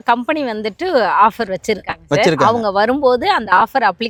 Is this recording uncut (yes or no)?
yes